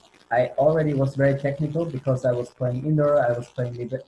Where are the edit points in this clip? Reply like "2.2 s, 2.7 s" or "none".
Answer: none